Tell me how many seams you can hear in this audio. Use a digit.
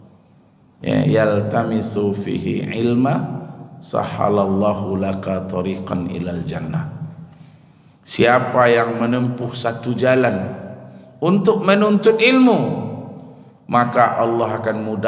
0